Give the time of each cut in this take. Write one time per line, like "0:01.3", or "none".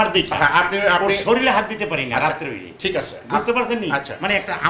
none